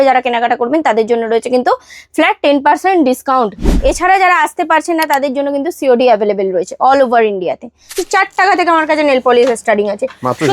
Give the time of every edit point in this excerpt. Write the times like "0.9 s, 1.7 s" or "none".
3.7 s, 8.0 s